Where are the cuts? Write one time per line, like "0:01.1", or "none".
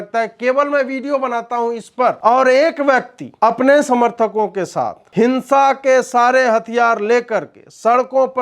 0:02.2
0:03.2
0:05.0